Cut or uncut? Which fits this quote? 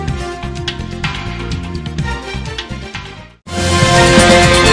uncut